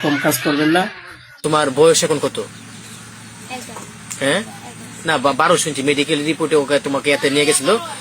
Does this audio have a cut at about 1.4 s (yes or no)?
yes